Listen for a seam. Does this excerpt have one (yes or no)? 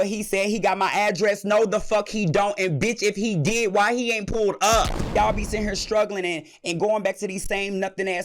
yes